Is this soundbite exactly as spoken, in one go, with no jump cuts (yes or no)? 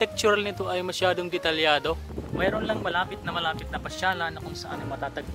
no